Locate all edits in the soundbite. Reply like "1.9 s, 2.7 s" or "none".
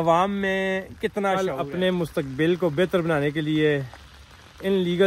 1.5 s